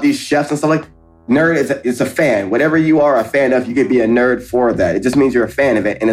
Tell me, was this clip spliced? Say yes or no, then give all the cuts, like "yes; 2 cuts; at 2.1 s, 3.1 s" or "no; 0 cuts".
yes; 1 cut; at 1.1 s